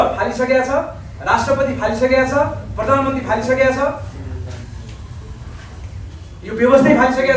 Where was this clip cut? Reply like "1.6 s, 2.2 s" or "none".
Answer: none